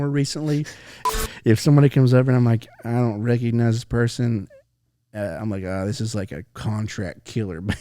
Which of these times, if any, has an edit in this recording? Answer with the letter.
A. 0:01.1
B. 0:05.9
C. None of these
A